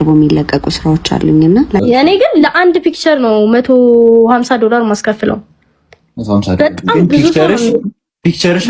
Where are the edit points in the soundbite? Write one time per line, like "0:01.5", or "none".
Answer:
0:01.8

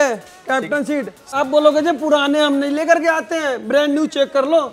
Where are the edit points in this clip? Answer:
0:01.3

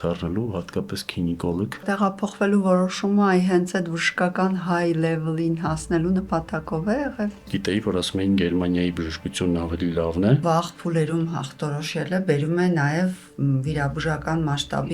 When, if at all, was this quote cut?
0:01.8
0:07.5
0:10.4

